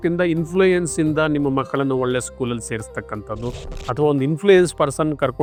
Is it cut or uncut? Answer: uncut